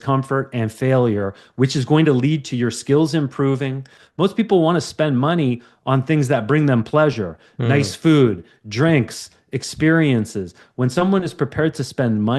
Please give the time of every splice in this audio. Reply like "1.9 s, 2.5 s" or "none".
4.0 s